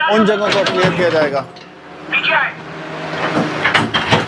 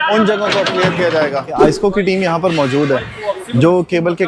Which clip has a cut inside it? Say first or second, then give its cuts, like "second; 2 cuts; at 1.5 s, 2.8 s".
second; 1 cut; at 1.6 s